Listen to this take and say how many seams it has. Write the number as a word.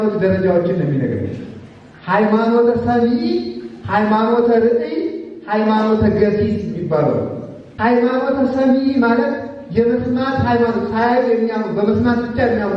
one